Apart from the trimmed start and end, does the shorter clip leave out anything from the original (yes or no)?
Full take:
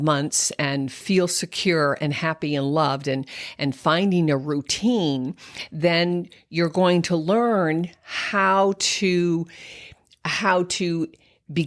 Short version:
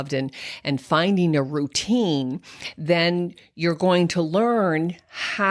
no